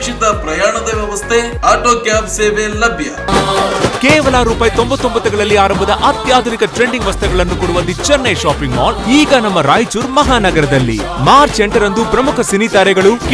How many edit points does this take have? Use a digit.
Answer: 1